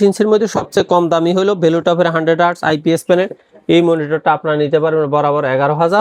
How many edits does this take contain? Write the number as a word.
zero